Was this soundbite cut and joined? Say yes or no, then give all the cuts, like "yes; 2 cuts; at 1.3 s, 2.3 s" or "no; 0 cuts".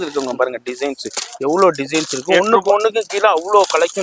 no; 0 cuts